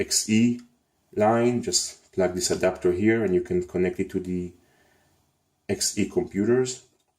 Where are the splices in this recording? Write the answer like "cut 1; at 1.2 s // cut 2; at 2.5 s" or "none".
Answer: cut 1; at 1.8 s